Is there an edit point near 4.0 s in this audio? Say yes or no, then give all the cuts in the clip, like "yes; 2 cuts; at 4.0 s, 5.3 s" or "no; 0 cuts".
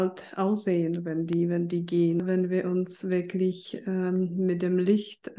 no; 1 cut; at 2.2 s